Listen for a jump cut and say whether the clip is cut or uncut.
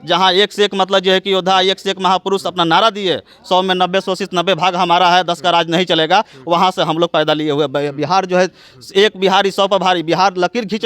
uncut